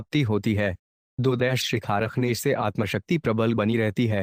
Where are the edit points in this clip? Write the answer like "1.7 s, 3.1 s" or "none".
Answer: none